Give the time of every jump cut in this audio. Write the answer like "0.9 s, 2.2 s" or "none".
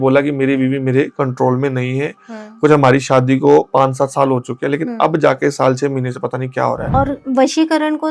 6.9 s